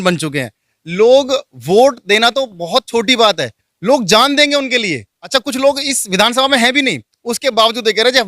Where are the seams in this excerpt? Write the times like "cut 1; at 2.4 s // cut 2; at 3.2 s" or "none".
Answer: cut 1; at 5.1 s

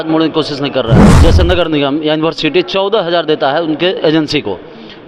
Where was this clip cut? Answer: cut 1; at 1.1 s

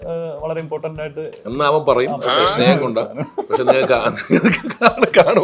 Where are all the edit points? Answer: none

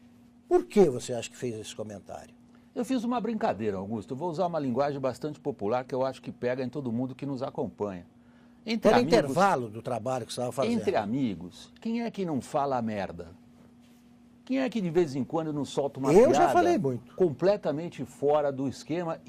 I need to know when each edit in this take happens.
cut 1; at 17.0 s

